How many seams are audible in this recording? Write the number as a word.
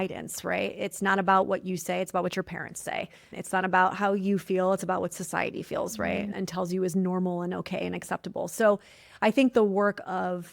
two